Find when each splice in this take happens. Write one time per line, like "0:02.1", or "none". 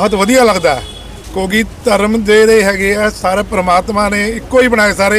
none